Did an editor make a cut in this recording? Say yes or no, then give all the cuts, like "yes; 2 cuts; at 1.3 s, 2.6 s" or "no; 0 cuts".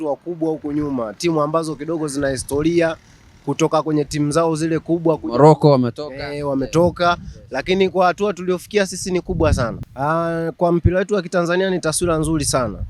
yes; 1 cut; at 9.8 s